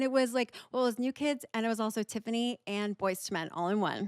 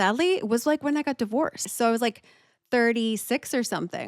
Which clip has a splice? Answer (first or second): second